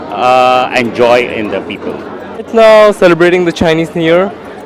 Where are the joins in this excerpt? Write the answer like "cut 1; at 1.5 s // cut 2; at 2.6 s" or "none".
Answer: cut 1; at 2.5 s

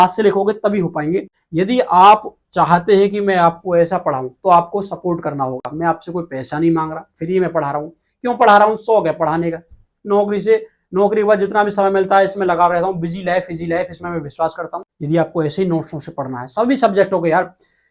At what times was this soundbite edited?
cut 1; at 1.4 s // cut 2; at 14.9 s

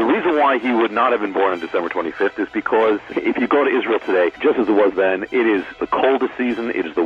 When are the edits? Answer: cut 1; at 3.1 s // cut 2; at 4.4 s // cut 3; at 5.8 s

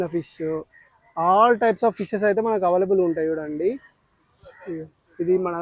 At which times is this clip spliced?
none

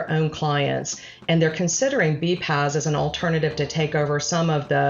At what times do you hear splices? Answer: none

